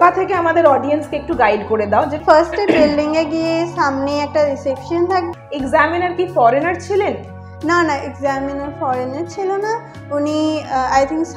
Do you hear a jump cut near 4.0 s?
no; 2 cuts; at 2.2 s, 5.3 s

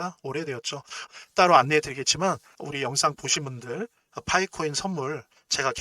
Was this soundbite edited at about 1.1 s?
no; 1 cut; at 2.5 s

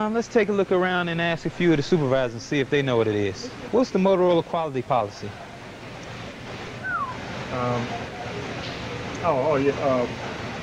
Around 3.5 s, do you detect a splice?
yes; 1 cut; at 3.5 s

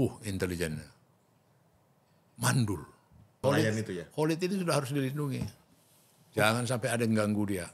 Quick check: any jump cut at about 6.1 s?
no; 1 cut; at 3.3 s

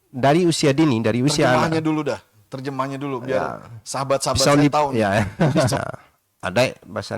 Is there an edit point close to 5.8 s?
yes; 1 cut; at 5.8 s

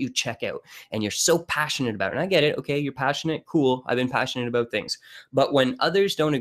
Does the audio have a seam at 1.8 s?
yes; 1 cut; at 1.8 s

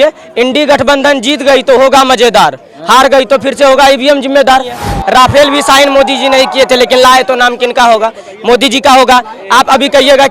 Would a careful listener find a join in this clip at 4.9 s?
yes; 1 cut; at 4.9 s

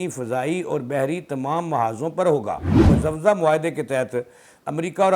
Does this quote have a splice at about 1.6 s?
no; 1 cut; at 2.9 s

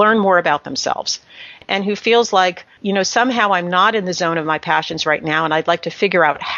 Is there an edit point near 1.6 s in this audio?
yes; 2 cuts; at 1.6 s, 2.7 s

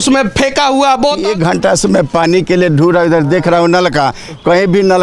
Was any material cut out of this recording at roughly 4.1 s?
no; 1 cut; at 1.2 s

